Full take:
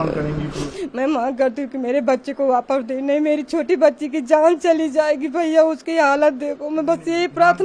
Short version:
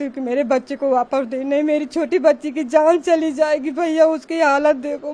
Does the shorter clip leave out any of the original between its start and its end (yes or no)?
no